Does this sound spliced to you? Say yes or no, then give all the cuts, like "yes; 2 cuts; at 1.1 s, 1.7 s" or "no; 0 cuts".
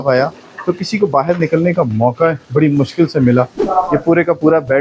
yes; 1 cut; at 3.6 s